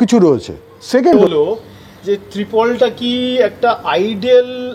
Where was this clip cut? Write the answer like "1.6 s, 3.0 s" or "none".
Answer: 1.2 s